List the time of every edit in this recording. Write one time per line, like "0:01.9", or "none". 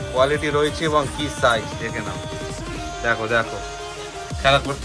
none